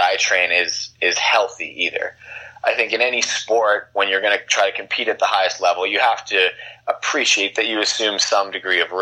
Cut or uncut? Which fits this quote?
uncut